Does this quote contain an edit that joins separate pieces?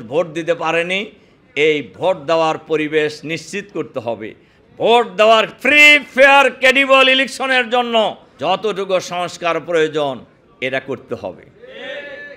yes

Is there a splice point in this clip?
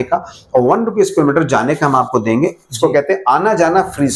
no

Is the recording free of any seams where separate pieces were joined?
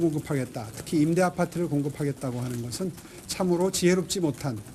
yes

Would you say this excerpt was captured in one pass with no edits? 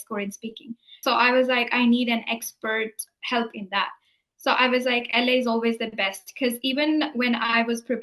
no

